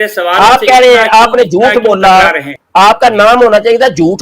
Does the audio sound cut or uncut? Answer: cut